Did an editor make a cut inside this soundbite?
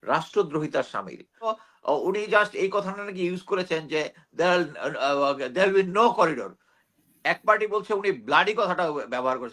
yes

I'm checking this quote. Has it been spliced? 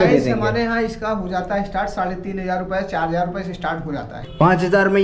yes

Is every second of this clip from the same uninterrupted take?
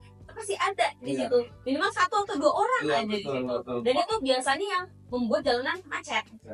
yes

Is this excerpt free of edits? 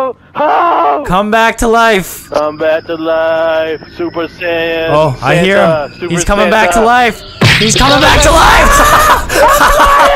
yes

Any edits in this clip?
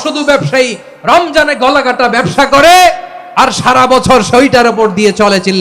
no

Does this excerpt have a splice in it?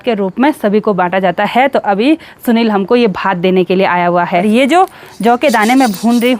yes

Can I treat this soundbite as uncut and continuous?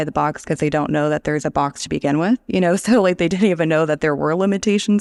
yes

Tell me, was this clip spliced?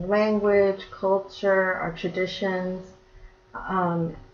no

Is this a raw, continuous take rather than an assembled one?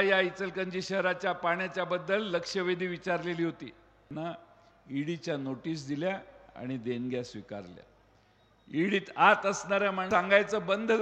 no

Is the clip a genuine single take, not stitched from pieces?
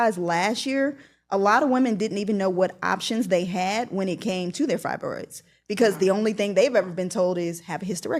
yes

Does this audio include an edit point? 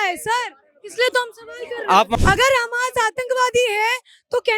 yes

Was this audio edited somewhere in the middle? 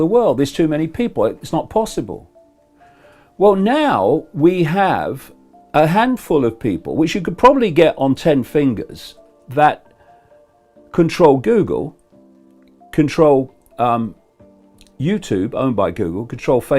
yes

